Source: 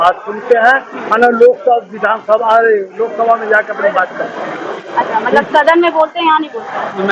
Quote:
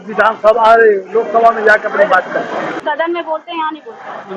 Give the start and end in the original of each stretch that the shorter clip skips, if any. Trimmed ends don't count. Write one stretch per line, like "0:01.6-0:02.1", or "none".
0:04.6-0:05.5